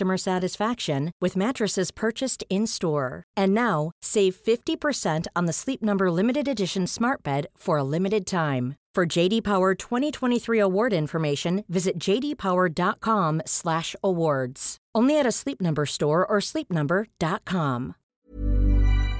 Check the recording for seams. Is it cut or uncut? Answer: cut